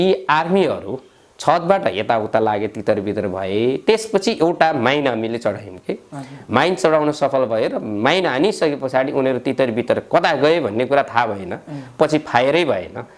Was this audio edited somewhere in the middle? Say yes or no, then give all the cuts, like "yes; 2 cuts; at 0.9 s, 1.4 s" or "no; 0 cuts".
no; 0 cuts